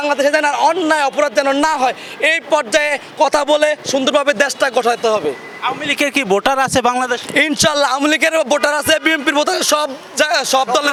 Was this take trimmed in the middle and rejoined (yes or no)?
no